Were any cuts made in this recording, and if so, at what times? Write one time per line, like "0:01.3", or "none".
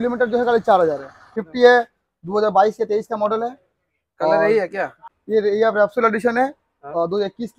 0:01.4
0:05.0